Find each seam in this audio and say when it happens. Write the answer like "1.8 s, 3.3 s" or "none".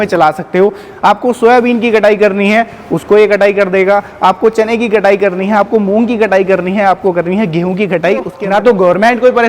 8.4 s